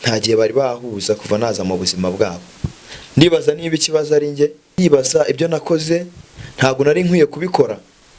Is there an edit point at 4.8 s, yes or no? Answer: yes